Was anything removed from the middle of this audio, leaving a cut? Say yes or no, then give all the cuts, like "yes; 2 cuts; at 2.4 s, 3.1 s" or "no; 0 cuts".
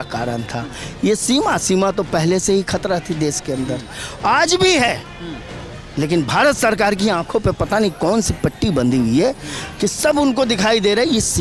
no; 0 cuts